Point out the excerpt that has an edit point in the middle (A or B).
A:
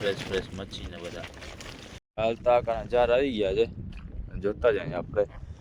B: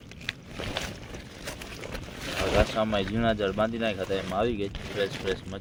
A